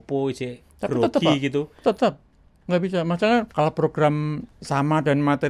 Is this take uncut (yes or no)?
yes